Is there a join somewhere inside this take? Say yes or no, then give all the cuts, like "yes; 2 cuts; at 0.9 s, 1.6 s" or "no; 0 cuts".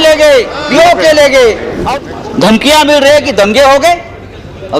yes; 1 cut; at 1.7 s